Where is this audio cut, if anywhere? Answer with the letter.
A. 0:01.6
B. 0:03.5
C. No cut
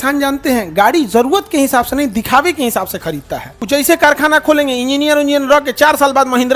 B